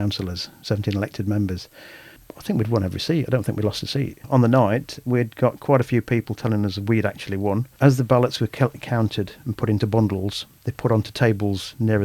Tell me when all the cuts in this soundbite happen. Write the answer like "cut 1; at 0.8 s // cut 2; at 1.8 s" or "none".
cut 1; at 2.3 s // cut 2; at 4.2 s // cut 3; at 7.7 s